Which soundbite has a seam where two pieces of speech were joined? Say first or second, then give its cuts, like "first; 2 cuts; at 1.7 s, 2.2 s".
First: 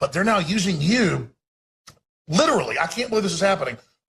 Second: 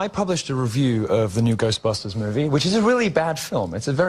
second; 1 cut; at 1.2 s